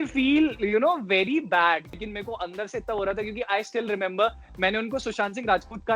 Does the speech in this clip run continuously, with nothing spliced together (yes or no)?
no